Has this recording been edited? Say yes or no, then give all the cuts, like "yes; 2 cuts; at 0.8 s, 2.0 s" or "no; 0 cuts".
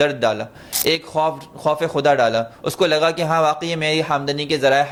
no; 0 cuts